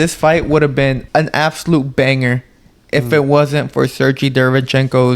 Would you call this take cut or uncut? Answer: cut